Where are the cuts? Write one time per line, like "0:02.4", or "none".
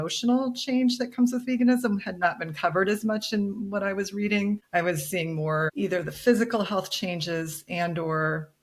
0:04.6
0:05.7